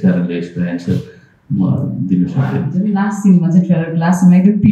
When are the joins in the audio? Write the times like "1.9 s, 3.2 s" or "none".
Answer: 2.7 s